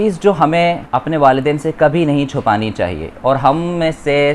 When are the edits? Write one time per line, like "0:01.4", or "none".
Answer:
0:00.9